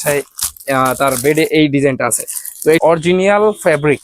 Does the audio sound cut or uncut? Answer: cut